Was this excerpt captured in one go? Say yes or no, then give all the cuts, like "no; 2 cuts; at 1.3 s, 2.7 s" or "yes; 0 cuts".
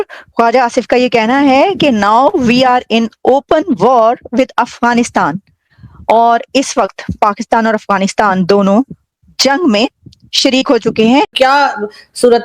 no; 1 cut; at 11.3 s